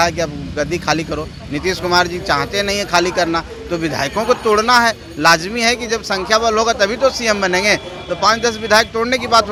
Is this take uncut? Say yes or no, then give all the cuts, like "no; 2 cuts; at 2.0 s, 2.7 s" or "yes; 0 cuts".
yes; 0 cuts